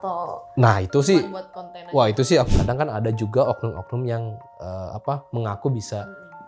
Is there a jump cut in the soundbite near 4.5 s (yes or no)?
no